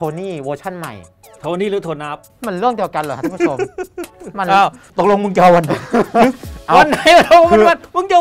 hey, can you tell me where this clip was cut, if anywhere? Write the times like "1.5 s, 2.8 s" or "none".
2.2 s, 4.8 s

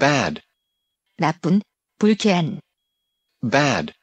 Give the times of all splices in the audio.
none

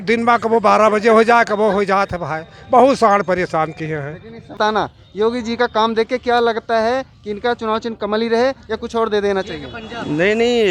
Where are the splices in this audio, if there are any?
4.6 s

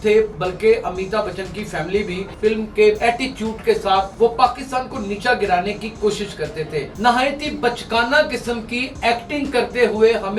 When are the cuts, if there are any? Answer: 2.3 s, 3.0 s, 4.1 s, 6.9 s

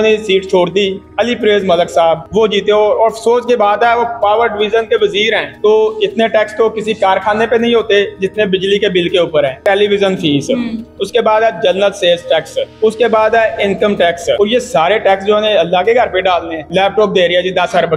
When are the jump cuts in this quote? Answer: 1.0 s, 2.2 s, 5.5 s, 9.6 s, 12.6 s, 14.4 s, 16.7 s

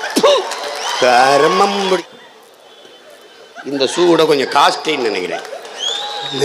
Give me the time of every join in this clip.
2.0 s

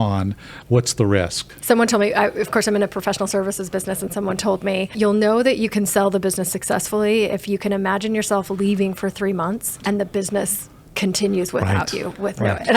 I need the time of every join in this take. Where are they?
1.5 s, 4.9 s, 9.7 s

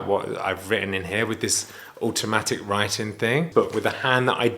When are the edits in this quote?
3.5 s

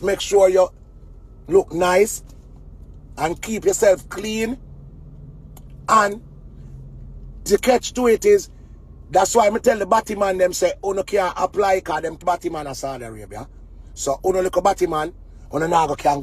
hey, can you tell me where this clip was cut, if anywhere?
12.2 s

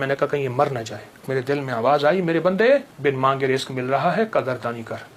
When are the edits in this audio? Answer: 1.3 s, 2.9 s

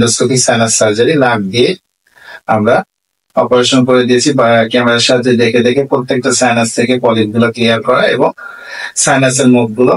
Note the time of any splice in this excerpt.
none

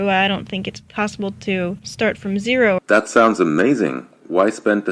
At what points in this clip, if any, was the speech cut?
1.8 s, 2.8 s

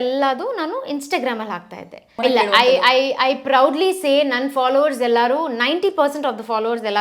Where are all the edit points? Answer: 2.2 s

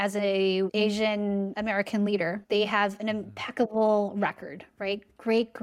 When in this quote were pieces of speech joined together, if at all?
1.0 s, 2.4 s

